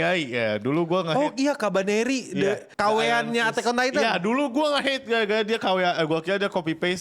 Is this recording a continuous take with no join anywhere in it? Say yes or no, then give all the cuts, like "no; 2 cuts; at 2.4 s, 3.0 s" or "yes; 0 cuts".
yes; 0 cuts